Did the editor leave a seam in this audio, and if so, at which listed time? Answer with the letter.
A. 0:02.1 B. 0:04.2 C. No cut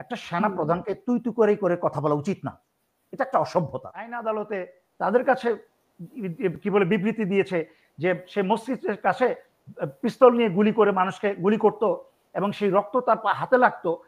B